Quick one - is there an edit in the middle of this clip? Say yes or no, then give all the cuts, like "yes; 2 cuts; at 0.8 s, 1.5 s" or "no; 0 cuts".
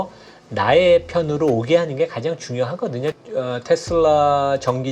yes; 1 cut; at 3.2 s